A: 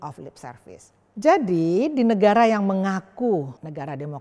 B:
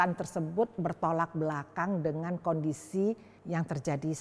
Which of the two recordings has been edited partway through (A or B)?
A